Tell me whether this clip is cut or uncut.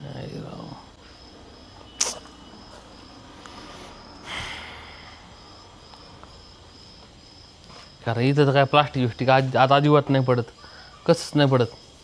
uncut